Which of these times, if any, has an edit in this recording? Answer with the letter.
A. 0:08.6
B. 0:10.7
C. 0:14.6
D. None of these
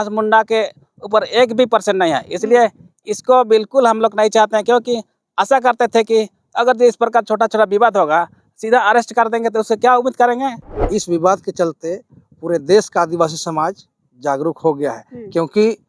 B